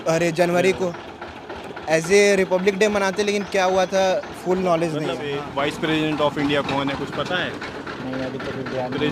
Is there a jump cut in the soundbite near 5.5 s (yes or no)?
yes